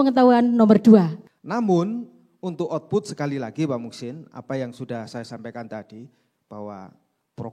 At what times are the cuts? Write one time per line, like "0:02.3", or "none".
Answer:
0:01.2